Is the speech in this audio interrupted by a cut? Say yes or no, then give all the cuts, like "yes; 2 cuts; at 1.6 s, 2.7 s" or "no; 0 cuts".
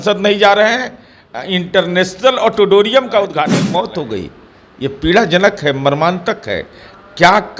yes; 1 cut; at 3.6 s